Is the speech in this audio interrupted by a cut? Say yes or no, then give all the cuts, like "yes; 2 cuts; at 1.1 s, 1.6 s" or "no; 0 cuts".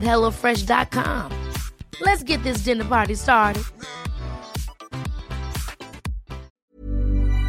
yes; 1 cut; at 6.6 s